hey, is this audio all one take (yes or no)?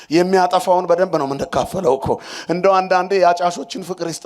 yes